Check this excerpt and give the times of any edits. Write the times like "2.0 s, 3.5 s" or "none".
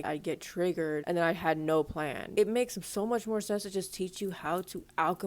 1.0 s, 2.2 s